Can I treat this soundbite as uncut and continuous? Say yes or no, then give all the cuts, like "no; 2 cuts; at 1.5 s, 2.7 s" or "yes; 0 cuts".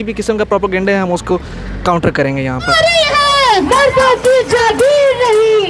no; 1 cut; at 2.8 s